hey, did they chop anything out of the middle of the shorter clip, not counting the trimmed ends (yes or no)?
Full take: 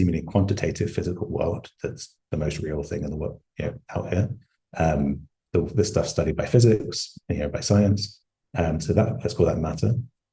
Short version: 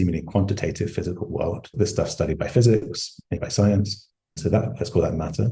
yes